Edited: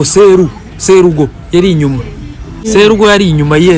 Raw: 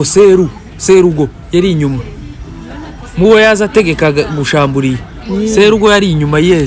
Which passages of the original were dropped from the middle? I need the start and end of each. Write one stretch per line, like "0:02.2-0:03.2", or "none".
0:02.7-0:05.5